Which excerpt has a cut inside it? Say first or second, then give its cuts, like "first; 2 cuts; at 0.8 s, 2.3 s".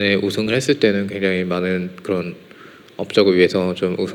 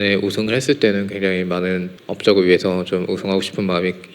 second; 1 cut; at 1.9 s